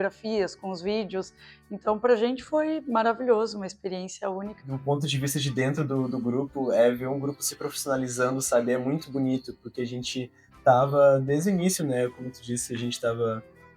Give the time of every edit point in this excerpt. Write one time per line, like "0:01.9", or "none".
0:04.7